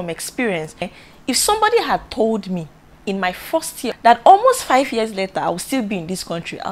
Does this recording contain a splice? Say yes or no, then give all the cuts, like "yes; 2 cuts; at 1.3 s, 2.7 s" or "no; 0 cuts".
yes; 2 cuts; at 1.0 s, 3.9 s